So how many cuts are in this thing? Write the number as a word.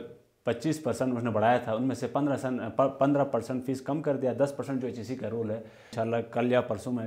one